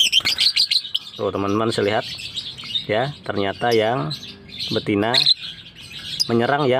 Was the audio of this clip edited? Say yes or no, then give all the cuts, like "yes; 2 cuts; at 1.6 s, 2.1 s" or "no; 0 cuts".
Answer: no; 0 cuts